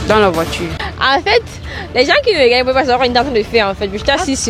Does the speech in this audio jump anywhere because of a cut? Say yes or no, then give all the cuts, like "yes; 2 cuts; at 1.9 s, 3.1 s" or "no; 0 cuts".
yes; 1 cut; at 0.9 s